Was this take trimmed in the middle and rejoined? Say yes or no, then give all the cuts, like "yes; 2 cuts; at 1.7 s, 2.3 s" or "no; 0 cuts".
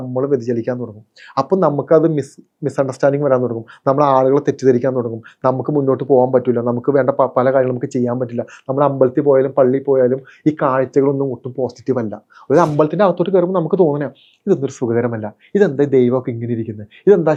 no; 0 cuts